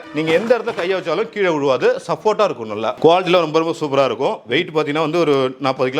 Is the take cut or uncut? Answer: cut